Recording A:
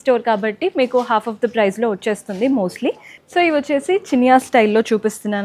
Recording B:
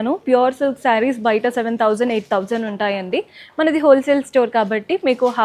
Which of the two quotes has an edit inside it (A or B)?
A